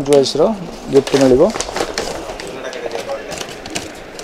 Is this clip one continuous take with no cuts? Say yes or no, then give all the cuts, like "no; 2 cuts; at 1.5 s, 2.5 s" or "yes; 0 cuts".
yes; 0 cuts